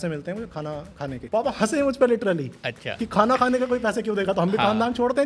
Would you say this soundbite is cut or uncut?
cut